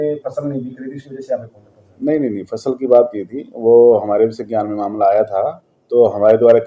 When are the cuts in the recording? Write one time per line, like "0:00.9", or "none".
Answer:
none